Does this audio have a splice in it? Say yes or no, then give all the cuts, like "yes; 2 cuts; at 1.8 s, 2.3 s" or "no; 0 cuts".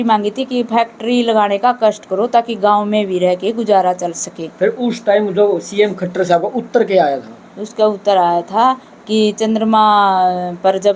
no; 0 cuts